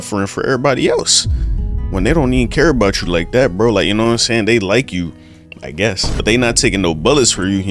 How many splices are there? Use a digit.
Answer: 1